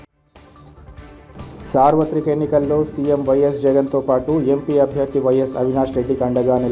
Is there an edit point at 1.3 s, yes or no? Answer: yes